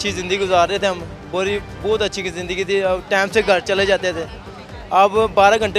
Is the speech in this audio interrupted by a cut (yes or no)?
no